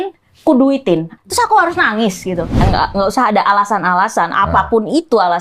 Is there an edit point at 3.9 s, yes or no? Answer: no